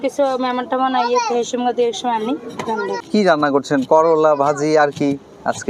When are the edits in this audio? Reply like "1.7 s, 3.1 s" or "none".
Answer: 3.0 s